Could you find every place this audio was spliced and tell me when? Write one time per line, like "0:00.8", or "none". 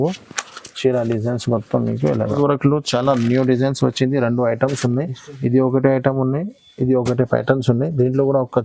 0:02.3